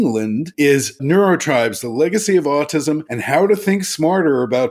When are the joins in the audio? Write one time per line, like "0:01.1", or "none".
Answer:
0:00.9
0:03.1